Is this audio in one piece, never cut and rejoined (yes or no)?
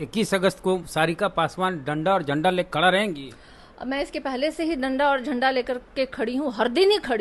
yes